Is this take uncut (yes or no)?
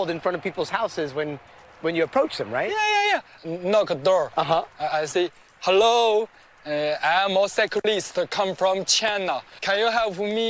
yes